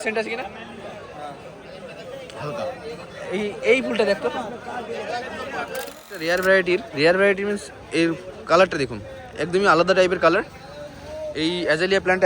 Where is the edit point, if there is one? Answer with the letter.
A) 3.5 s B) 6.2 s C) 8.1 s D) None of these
B